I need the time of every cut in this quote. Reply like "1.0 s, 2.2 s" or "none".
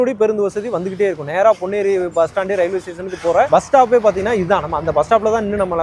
none